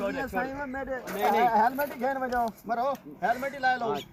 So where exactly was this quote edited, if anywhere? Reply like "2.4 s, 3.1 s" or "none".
none